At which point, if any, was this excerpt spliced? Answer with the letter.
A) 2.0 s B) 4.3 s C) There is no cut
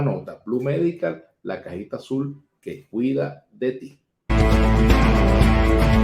B